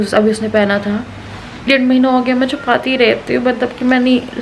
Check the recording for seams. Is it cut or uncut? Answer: cut